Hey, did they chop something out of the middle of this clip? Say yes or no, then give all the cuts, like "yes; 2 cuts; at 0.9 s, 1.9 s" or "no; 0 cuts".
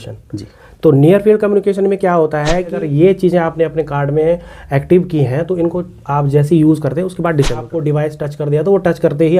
yes; 2 cuts; at 2.7 s, 7.7 s